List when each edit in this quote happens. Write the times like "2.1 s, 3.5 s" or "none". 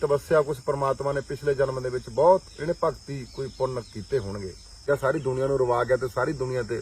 4.8 s